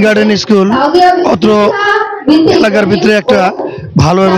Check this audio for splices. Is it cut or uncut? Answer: uncut